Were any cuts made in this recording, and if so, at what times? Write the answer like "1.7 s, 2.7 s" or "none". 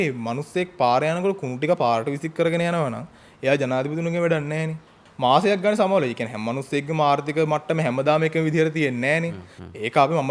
5.0 s